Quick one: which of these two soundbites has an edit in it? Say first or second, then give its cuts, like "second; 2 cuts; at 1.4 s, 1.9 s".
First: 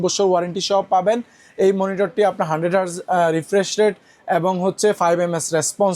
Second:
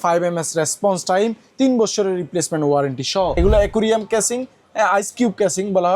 second; 1 cut; at 3.3 s